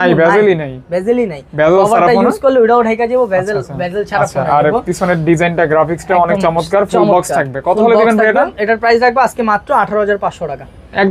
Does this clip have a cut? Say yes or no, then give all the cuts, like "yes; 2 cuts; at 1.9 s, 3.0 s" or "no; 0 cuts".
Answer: no; 0 cuts